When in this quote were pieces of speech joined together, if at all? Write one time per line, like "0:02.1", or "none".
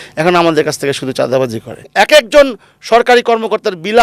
0:01.9